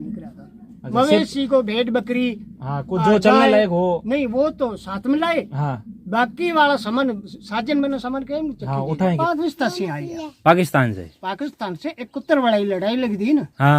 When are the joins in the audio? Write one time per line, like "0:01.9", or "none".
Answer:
0:09.2